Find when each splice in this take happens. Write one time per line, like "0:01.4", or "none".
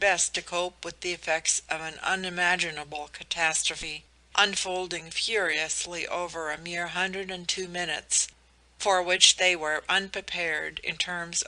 0:09.5